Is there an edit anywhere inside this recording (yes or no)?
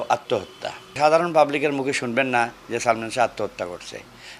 yes